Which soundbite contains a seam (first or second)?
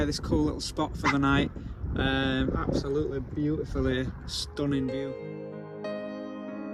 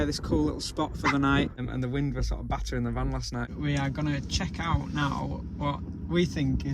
second